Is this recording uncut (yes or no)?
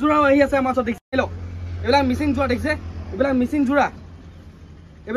no